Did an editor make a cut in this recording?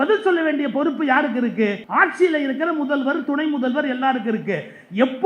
yes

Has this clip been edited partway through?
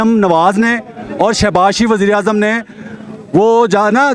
no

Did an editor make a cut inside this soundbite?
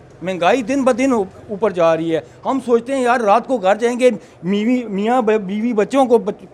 no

